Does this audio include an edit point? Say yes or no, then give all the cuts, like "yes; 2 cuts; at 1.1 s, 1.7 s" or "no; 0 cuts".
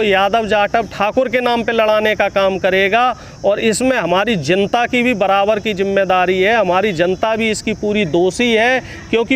no; 0 cuts